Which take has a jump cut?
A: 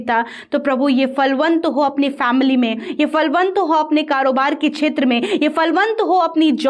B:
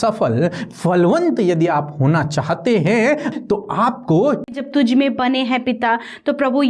B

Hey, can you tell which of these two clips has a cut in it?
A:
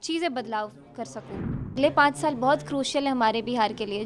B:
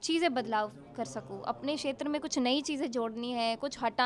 A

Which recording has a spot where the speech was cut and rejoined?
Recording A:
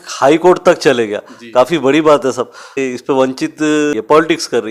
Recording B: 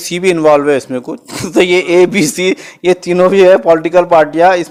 A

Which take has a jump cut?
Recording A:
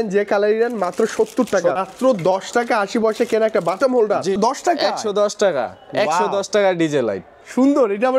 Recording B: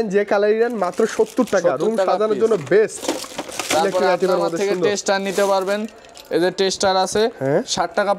A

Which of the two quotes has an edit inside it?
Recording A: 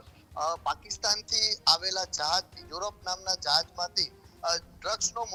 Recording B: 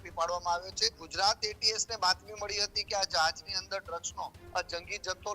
B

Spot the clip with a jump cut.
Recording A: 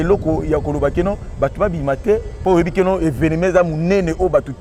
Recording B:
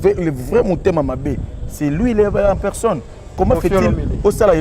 B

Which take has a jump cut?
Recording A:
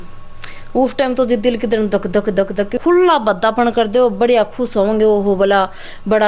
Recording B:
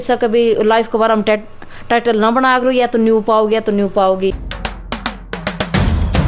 A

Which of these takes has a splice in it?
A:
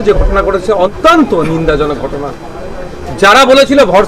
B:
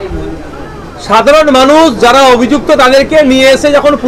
A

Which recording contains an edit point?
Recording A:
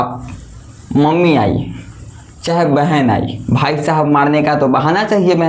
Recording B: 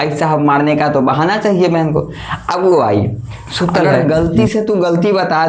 B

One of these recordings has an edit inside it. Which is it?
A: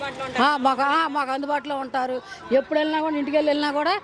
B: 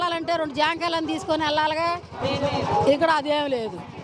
B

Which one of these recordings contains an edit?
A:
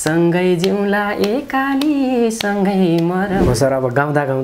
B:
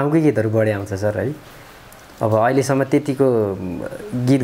A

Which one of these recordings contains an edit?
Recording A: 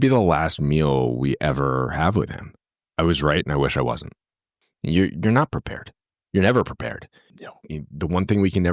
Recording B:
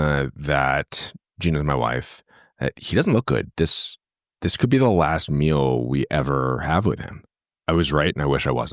A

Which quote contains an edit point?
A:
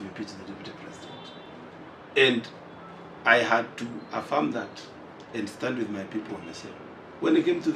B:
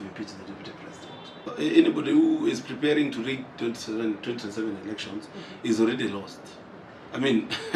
B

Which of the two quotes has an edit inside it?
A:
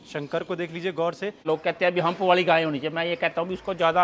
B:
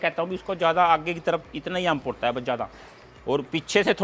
A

